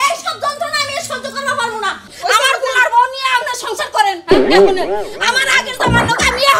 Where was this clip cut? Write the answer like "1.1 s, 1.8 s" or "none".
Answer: 2.2 s